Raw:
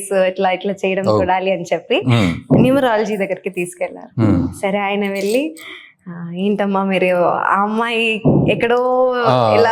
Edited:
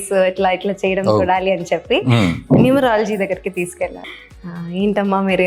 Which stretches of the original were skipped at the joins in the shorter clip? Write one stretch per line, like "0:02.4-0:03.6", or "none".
0:04.0-0:05.7